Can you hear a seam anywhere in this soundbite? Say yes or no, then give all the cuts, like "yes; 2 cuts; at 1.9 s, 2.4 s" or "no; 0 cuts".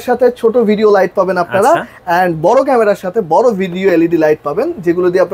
no; 0 cuts